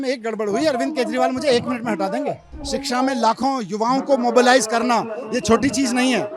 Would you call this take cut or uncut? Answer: cut